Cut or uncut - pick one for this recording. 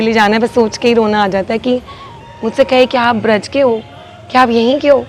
cut